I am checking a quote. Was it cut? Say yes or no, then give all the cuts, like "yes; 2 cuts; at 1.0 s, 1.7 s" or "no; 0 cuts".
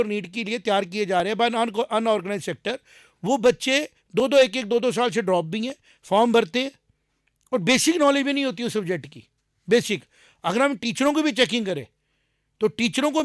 no; 0 cuts